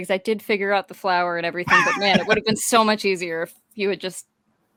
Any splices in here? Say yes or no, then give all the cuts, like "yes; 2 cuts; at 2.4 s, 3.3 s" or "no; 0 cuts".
no; 0 cuts